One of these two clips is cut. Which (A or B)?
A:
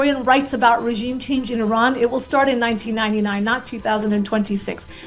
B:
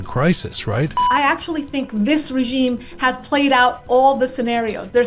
B